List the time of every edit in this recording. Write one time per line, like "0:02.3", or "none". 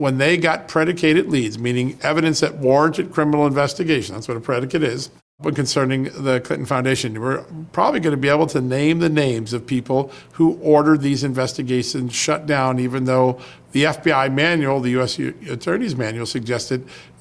0:05.4